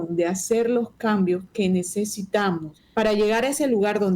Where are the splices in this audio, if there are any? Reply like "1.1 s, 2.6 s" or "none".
2.8 s